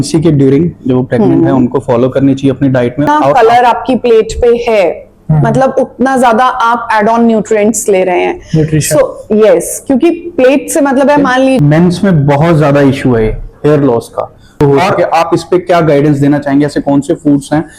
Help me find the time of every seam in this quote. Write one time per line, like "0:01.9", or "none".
0:03.2
0:11.6
0:14.6